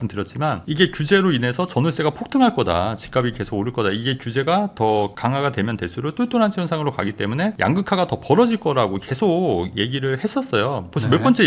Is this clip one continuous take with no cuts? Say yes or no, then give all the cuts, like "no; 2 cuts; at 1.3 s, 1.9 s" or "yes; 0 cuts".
yes; 0 cuts